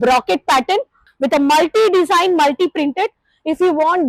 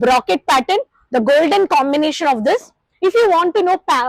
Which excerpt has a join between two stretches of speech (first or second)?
first